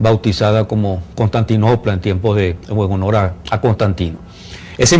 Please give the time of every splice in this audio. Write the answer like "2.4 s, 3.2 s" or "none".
3.8 s